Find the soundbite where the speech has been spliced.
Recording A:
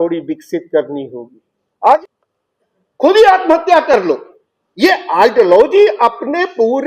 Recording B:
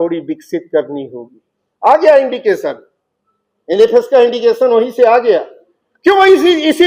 A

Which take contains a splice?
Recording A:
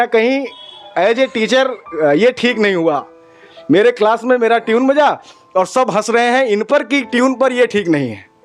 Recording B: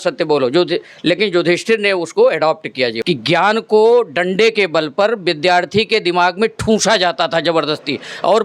B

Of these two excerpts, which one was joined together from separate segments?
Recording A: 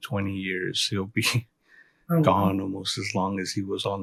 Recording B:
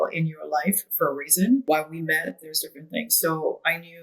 B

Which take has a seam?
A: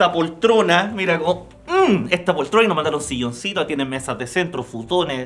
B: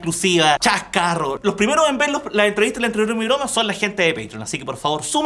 B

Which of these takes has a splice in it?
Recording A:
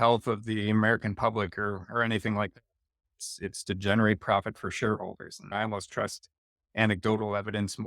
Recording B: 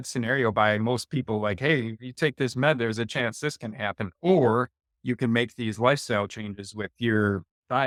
A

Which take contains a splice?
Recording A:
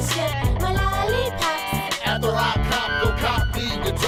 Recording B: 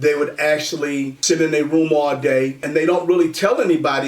B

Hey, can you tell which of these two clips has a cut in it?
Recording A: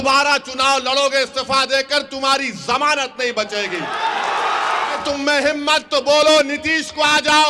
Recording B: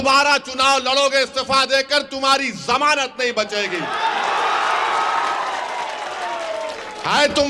A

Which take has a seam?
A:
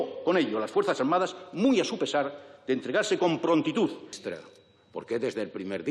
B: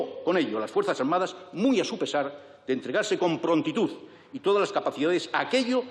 A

